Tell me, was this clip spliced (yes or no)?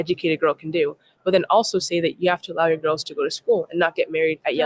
no